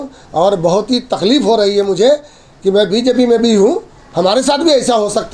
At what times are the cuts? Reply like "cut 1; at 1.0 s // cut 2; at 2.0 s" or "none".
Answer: none